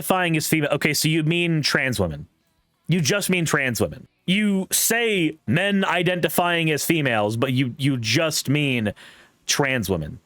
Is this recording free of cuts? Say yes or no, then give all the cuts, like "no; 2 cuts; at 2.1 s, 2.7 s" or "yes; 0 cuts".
no; 1 cut; at 4.1 s